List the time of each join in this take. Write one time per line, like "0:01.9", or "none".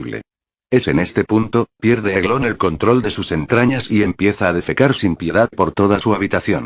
0:04.4